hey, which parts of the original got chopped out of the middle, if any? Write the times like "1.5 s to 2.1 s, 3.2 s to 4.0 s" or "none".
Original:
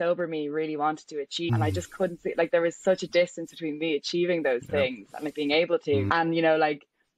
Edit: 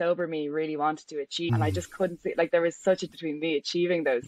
3.0 s to 3.4 s